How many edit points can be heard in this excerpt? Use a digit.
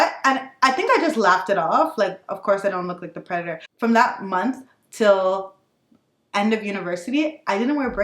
1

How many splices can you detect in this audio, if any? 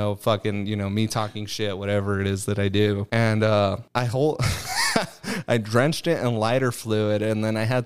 2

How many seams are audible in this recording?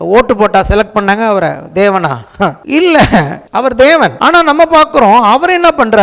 3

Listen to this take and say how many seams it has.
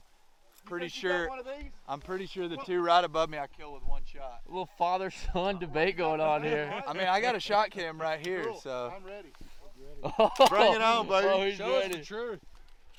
0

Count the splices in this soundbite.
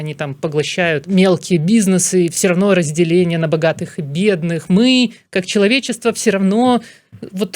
2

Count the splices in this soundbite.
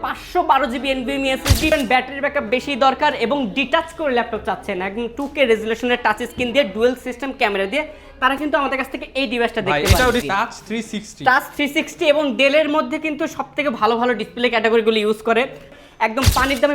3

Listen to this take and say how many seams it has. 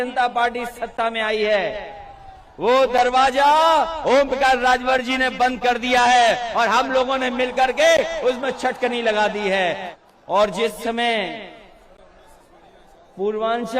1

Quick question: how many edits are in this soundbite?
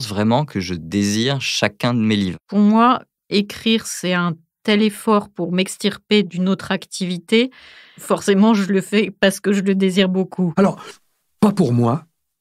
2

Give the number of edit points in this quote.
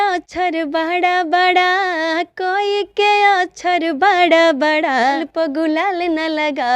1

